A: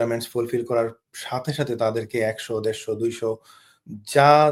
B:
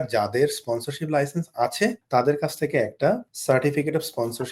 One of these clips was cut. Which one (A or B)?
B